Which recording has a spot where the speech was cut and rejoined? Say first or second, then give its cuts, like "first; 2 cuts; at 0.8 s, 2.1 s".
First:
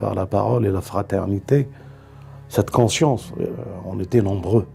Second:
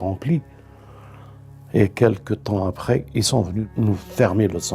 second; 1 cut; at 3.6 s